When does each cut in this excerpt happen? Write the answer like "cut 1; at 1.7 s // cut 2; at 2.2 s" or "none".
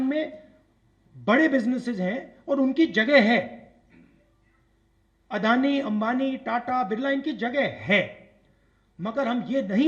none